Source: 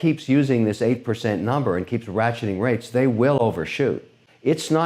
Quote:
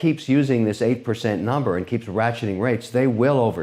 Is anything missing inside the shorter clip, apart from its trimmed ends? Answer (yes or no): no